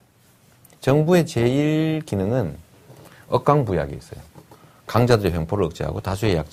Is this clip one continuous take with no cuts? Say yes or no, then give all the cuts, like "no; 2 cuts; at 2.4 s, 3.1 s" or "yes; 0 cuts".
yes; 0 cuts